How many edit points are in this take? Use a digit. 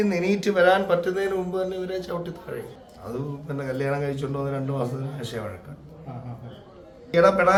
0